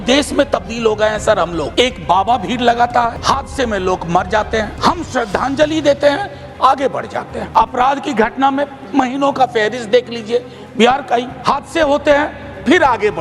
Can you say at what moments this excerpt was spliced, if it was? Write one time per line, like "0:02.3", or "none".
0:01.7
0:03.2
0:04.7
0:07.4
0:11.3